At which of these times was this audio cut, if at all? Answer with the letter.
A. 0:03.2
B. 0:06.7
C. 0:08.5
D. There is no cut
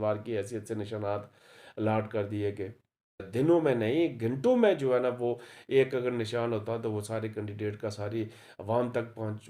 A